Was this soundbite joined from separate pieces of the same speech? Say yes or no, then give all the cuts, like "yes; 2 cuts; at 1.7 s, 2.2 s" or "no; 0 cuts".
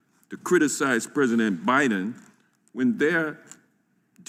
no; 0 cuts